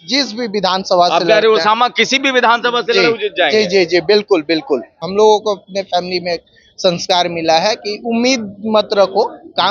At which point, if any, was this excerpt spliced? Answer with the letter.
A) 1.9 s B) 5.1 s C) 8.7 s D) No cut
B